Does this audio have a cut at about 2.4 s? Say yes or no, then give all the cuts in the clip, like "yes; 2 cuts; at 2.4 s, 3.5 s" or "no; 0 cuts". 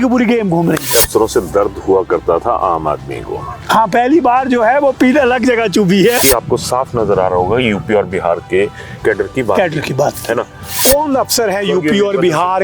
no; 3 cuts; at 1.0 s, 6.2 s, 10.8 s